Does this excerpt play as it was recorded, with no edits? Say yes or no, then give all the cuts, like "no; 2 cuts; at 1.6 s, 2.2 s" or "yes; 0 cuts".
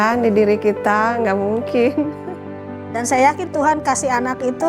no; 1 cut; at 2.7 s